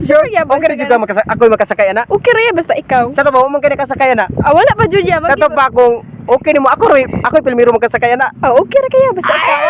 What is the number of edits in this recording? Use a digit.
1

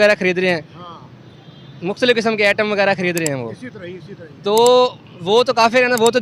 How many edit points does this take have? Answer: 0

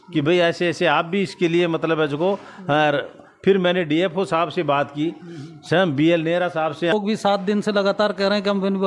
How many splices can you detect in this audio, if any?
1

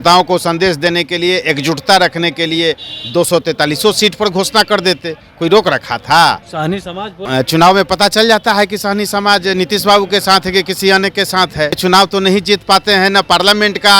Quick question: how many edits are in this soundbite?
2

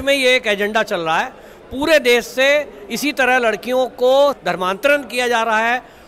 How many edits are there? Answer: 0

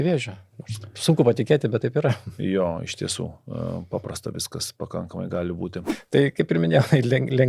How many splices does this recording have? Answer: 1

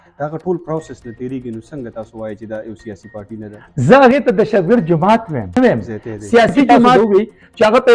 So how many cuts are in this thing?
2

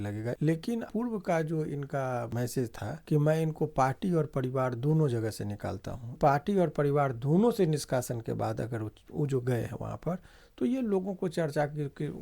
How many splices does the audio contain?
3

